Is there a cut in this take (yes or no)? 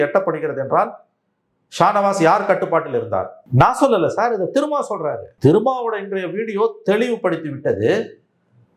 yes